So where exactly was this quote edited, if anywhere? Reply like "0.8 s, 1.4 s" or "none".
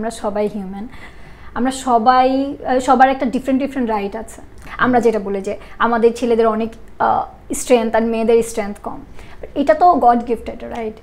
4.6 s